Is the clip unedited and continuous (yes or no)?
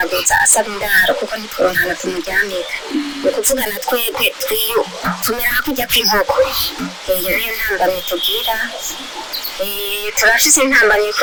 yes